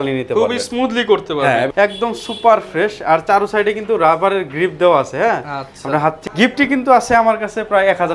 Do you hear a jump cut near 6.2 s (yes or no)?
yes